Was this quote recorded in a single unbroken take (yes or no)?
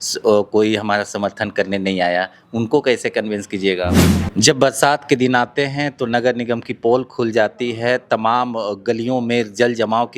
no